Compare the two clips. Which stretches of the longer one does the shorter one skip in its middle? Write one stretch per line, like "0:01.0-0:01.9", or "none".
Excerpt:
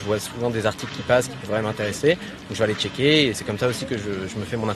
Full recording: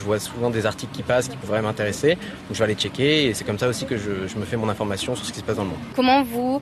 none